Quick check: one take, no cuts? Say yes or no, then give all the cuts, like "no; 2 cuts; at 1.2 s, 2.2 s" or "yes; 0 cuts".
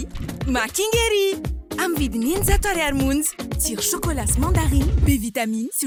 yes; 0 cuts